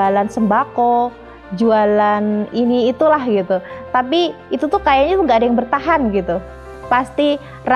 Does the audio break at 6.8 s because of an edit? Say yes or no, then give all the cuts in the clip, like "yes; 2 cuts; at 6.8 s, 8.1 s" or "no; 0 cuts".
yes; 1 cut; at 6.8 s